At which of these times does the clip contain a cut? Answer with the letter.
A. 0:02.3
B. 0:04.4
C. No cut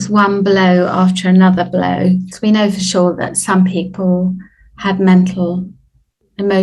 A